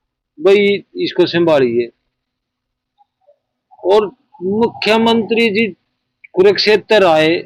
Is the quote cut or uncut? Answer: uncut